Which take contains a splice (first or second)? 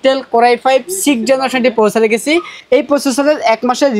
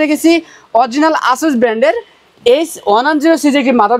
first